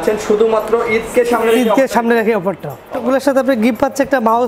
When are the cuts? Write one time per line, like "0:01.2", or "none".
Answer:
0:03.0